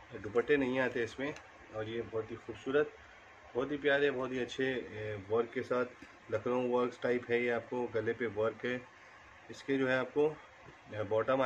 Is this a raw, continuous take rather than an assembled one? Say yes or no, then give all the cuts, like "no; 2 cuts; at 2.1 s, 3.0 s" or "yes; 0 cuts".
yes; 0 cuts